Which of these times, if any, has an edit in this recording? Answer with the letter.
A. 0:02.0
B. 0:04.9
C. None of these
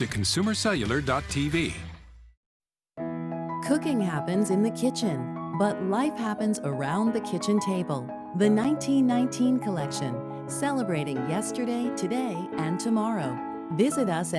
A